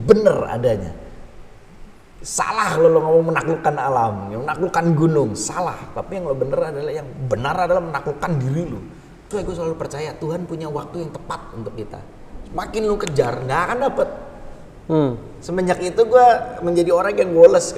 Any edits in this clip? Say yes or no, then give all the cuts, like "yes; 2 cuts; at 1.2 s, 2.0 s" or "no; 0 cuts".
yes; 1 cut; at 9.3 s